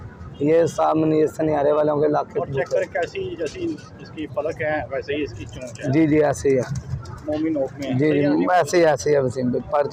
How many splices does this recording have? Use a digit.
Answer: 0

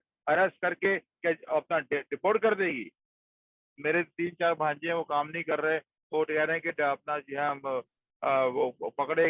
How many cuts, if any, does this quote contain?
1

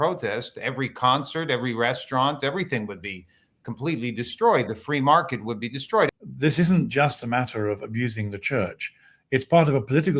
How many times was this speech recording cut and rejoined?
1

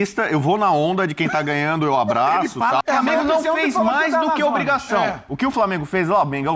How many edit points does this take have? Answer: 1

